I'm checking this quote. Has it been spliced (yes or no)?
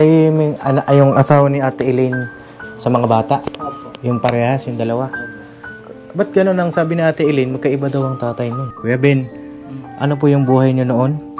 yes